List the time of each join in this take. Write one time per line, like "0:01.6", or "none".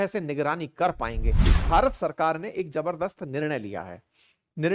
0:01.6